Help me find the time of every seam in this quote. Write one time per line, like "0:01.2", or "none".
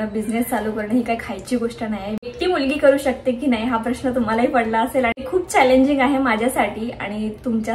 0:02.3
0:05.2